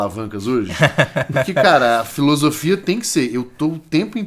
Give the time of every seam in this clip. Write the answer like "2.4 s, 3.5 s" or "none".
none